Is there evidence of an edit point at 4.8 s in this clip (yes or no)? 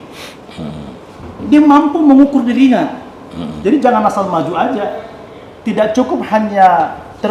no